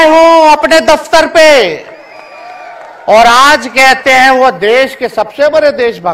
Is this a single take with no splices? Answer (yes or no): yes